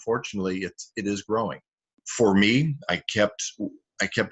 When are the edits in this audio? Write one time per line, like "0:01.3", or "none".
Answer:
0:02.1